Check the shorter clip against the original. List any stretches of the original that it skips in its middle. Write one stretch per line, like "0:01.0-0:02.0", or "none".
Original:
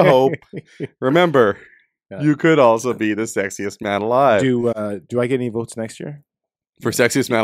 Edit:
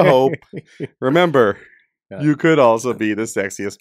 none